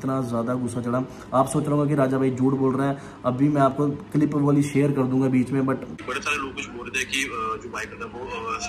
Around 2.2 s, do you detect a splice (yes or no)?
no